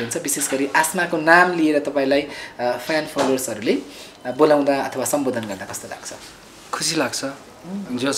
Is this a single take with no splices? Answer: yes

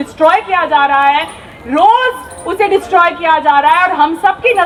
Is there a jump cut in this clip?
no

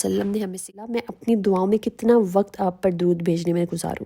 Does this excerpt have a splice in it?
yes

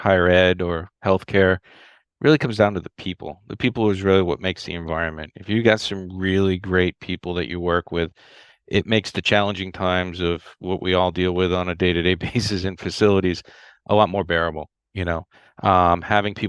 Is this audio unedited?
yes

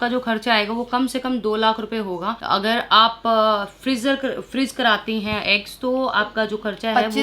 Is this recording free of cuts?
yes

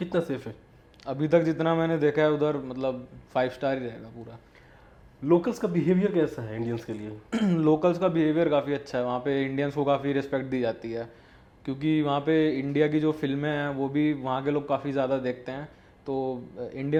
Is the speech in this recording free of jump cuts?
yes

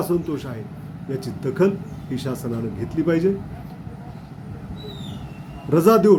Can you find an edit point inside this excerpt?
no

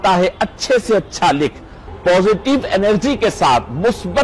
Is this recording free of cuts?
no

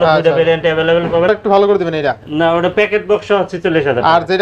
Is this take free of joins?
no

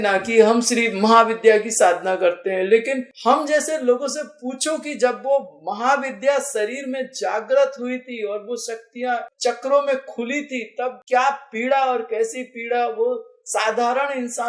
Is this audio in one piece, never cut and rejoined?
yes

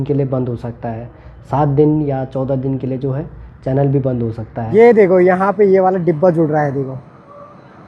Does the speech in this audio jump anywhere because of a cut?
yes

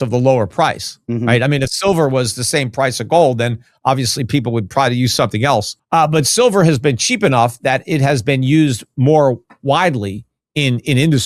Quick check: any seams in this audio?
yes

